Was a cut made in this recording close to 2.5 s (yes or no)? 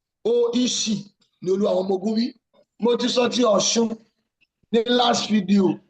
yes